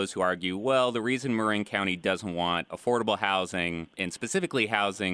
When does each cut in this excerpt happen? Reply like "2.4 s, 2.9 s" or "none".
4.0 s